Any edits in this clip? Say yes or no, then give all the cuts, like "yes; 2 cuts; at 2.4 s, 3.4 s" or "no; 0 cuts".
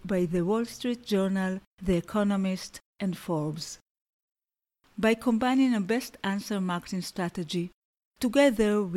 no; 0 cuts